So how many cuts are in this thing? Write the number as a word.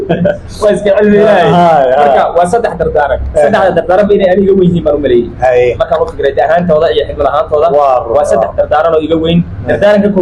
zero